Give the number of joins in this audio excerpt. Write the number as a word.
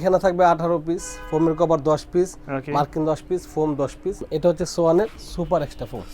one